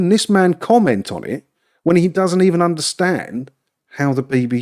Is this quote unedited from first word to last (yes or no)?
yes